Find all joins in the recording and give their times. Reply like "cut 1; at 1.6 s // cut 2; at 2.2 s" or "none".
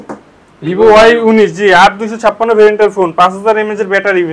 none